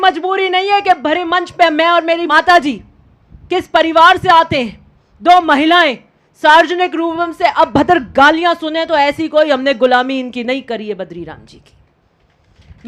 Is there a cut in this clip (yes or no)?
yes